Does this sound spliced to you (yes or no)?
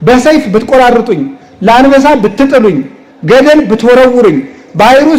no